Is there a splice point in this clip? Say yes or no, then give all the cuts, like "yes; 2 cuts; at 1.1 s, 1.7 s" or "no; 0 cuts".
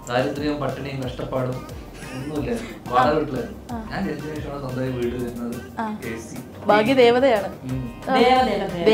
yes; 1 cut; at 6.5 s